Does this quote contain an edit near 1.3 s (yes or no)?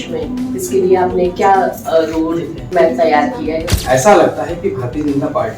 no